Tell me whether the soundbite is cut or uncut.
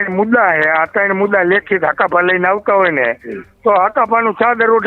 uncut